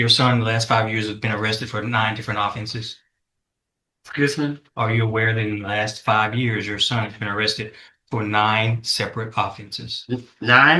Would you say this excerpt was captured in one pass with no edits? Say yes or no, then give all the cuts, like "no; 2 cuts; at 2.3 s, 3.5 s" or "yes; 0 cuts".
yes; 0 cuts